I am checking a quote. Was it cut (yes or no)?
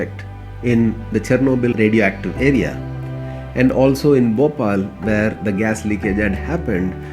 no